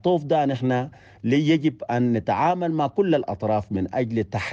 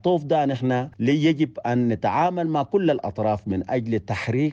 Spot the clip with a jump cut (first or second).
second